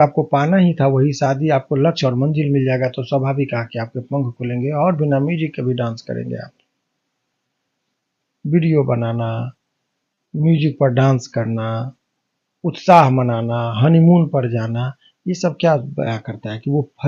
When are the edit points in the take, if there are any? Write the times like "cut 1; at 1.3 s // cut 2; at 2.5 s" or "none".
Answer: none